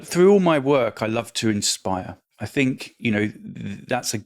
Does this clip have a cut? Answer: no; 0 cuts

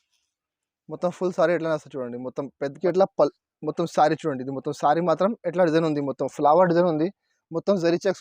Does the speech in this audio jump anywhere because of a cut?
yes; 1 cut; at 2.8 s

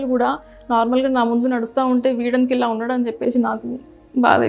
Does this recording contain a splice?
no; 0 cuts

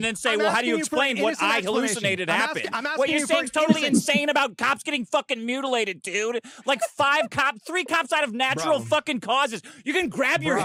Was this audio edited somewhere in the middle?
no; 0 cuts

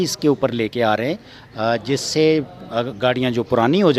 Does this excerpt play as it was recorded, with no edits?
yes; 0 cuts

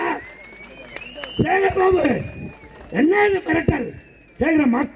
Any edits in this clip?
no; 0 cuts

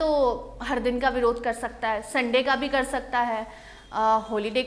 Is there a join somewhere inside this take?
no; 0 cuts

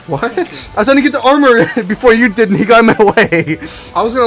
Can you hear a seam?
no; 0 cuts

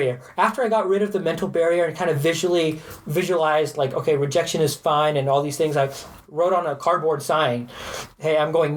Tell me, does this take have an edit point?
no; 0 cuts

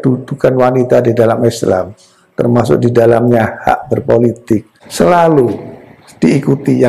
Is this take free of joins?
no; 1 cut; at 4.8 s

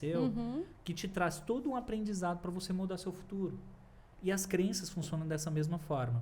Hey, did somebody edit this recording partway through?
no; 0 cuts

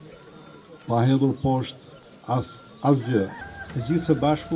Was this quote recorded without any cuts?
no; 1 cut; at 3.4 s

